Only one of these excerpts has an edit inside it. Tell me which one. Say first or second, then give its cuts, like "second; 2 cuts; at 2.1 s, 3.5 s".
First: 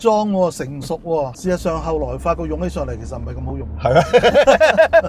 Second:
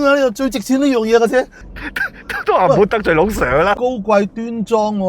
second; 1 cut; at 3.7 s